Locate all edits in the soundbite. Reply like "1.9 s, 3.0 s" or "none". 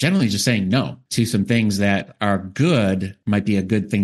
1.0 s, 3.1 s